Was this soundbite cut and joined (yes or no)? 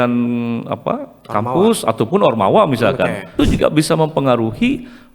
yes